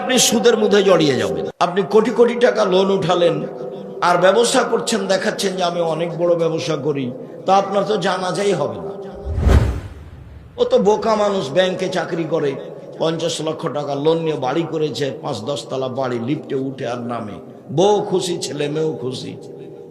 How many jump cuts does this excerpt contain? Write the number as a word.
one